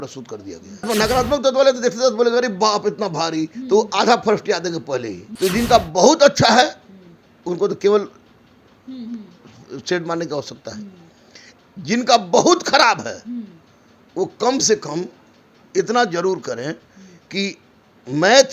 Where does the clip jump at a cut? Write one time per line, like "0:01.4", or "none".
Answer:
0:00.9
0:05.2